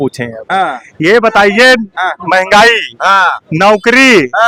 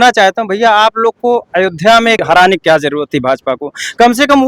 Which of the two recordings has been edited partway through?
second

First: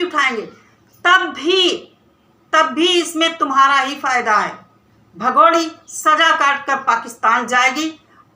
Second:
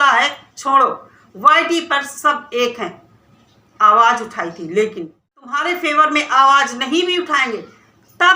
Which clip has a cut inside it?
second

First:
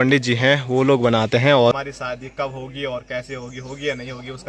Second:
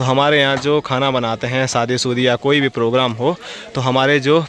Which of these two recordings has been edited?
first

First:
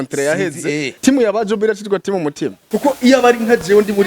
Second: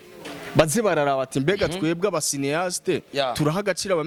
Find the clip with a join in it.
first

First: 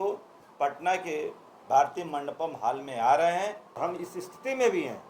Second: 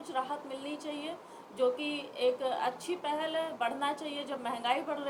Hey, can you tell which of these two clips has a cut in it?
first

